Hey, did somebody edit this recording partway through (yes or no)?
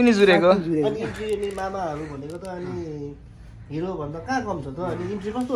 no